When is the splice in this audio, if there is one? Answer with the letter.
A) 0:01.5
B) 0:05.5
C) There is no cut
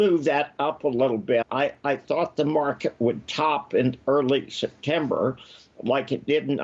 A